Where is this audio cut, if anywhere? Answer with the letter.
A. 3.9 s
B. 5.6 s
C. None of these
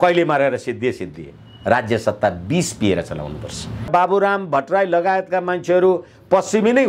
A